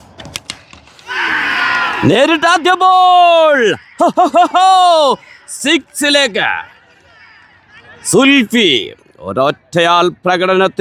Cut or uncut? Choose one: uncut